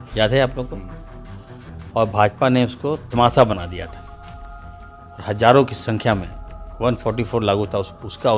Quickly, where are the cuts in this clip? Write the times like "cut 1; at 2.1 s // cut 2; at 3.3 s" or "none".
none